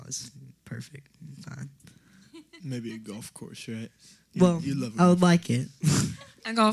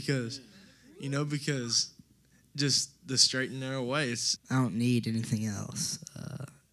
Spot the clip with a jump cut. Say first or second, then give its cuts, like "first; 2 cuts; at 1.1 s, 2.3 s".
second; 1 cut; at 4.3 s